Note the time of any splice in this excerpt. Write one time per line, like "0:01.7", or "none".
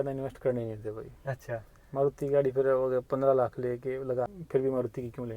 0:04.3